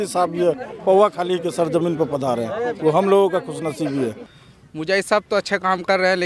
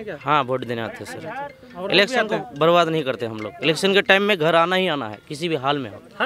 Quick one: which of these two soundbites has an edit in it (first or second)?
first